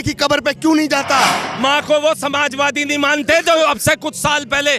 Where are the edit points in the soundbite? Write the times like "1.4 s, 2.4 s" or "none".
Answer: 1.4 s

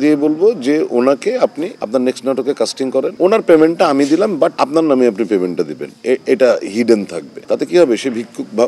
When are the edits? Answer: 7.3 s

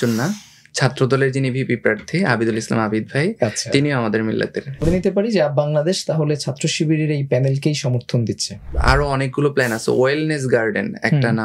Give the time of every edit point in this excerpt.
4.8 s, 8.7 s

